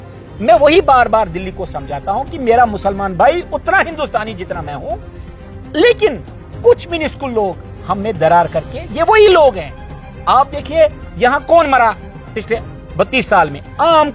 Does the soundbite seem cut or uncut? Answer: uncut